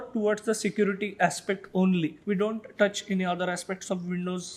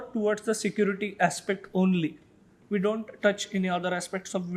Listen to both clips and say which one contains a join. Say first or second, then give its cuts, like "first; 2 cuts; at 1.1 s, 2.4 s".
first; 1 cut; at 2.2 s